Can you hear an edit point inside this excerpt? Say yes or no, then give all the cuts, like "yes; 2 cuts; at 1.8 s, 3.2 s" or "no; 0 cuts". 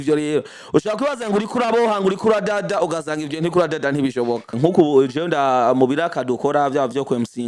yes; 1 cut; at 4.5 s